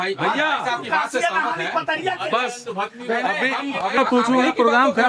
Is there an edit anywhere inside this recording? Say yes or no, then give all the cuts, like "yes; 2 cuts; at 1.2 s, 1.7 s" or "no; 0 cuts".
yes; 1 cut; at 4.0 s